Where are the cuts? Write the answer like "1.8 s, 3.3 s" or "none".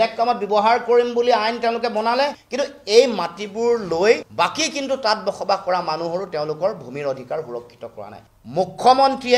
8.2 s